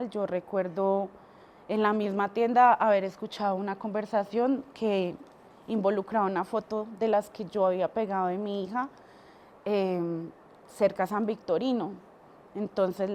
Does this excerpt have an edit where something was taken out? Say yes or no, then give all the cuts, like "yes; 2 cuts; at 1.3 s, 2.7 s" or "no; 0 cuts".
no; 0 cuts